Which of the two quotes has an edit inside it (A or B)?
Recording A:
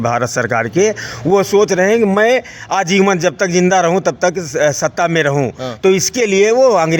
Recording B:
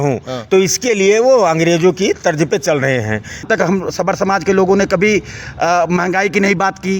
B